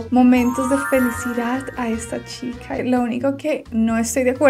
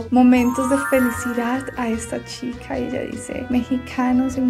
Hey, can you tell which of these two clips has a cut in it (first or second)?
first